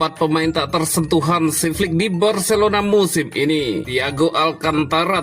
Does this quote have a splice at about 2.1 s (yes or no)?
no